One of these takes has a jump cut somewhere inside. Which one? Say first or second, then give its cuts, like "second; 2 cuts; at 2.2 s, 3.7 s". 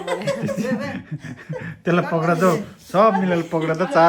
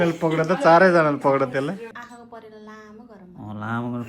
second; 1 cut; at 1.9 s